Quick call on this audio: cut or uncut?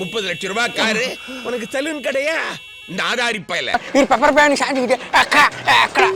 cut